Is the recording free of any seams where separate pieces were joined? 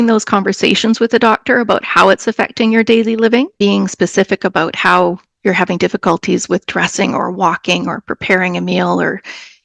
no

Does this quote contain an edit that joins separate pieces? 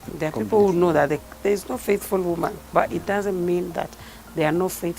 yes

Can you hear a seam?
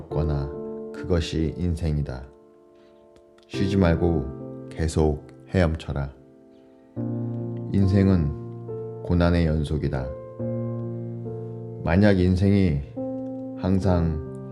no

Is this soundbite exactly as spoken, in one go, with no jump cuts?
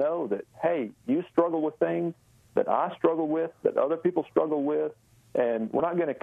yes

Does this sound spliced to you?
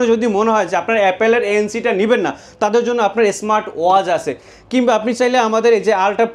no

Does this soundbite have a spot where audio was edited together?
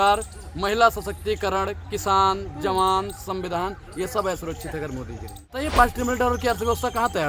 yes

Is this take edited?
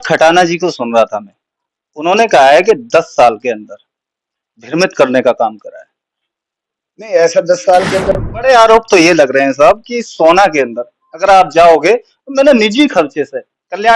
yes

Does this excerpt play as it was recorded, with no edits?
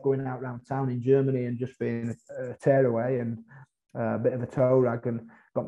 yes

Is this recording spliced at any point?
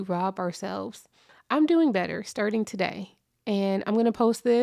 yes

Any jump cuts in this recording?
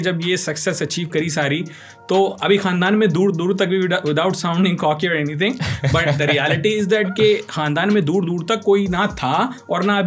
no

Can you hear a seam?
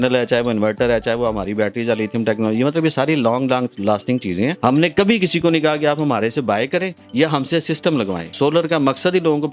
yes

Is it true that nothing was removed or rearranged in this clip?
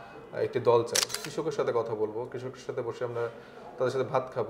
no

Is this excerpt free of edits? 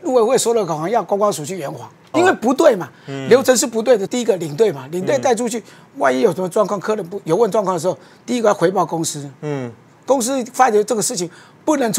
no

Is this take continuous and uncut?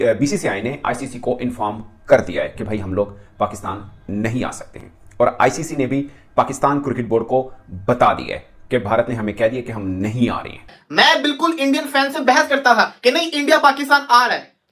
no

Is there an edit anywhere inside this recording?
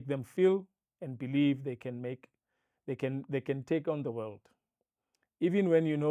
no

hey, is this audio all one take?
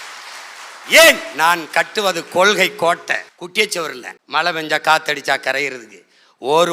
no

